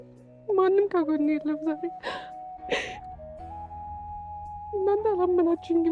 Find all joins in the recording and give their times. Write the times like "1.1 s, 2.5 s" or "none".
2.3 s